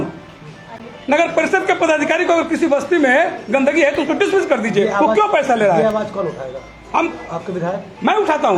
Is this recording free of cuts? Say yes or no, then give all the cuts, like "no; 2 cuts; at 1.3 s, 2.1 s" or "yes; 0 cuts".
yes; 0 cuts